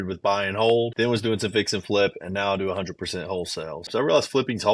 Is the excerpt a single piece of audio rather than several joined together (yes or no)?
no